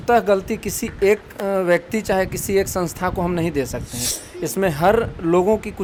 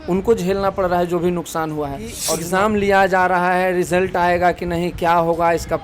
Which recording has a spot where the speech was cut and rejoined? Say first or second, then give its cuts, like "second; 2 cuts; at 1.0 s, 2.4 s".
second; 1 cut; at 2.2 s